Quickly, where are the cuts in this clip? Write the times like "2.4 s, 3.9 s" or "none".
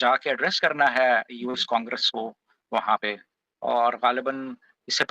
none